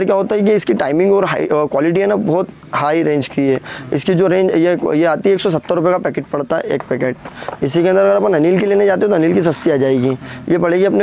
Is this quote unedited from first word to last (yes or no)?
yes